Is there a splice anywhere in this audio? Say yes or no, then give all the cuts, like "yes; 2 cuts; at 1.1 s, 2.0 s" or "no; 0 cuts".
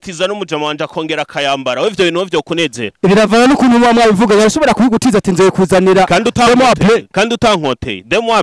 no; 0 cuts